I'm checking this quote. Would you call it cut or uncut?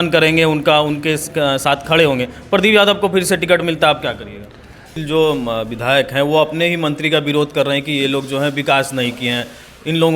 cut